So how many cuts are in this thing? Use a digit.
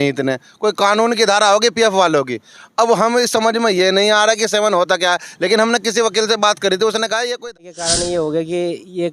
1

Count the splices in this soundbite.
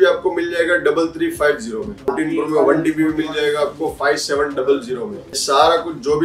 2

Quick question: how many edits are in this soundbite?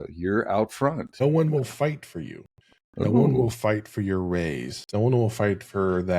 1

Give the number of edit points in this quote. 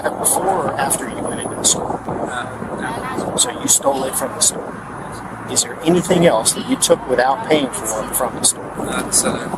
0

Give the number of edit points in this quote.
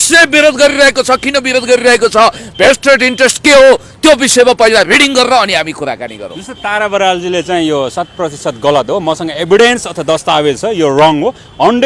0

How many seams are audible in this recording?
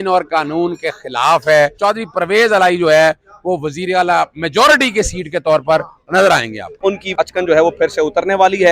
2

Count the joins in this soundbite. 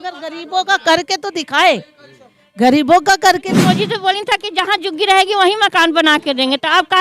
1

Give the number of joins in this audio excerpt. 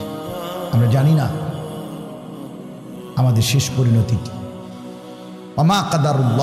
4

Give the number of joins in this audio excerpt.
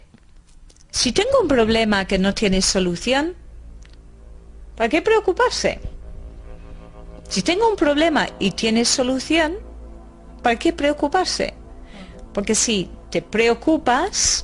1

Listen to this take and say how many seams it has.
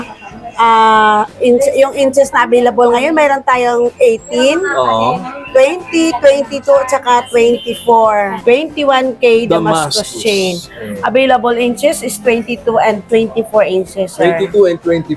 1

